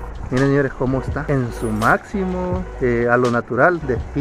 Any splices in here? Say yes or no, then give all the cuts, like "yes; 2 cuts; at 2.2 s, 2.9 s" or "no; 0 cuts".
yes; 2 cuts; at 1.2 s, 2.7 s